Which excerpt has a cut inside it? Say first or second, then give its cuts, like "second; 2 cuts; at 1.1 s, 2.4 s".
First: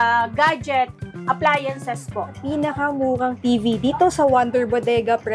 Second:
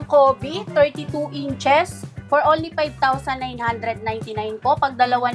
first; 2 cuts; at 2.3 s, 3.4 s